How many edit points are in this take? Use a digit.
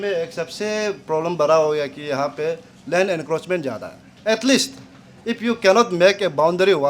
1